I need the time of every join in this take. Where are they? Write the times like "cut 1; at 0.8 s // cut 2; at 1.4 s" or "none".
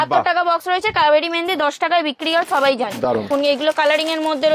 cut 1; at 3.3 s